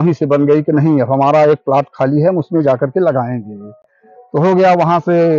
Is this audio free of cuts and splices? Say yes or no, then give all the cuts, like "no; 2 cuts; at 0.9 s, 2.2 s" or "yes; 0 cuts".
yes; 0 cuts